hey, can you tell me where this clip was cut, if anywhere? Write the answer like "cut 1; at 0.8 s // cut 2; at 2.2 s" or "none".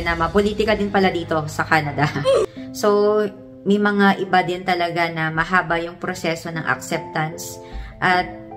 cut 1; at 2.4 s

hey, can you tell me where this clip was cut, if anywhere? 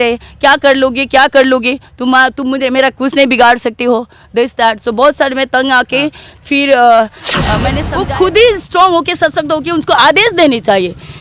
cut 1; at 7.8 s

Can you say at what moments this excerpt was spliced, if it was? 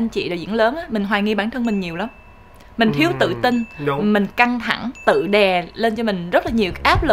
none

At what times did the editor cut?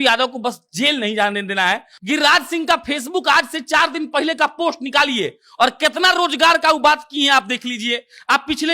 cut 1; at 1.9 s

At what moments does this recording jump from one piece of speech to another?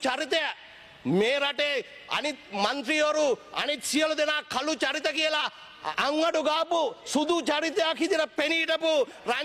none

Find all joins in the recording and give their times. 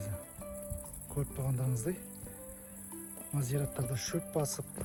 none

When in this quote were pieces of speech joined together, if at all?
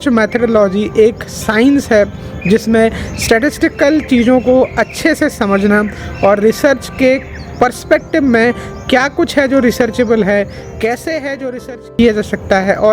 none

